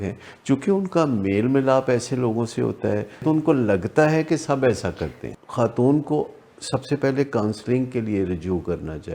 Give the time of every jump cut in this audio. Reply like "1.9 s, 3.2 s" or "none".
3.2 s, 5.2 s